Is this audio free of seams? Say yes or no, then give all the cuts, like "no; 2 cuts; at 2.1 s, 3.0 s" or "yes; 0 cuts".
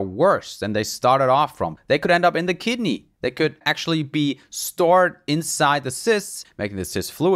no; 3 cuts; at 1.8 s, 3.6 s, 6.5 s